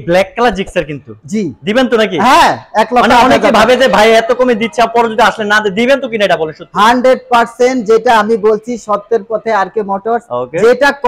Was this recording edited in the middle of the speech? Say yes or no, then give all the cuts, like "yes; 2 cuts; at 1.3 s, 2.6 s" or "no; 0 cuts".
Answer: no; 0 cuts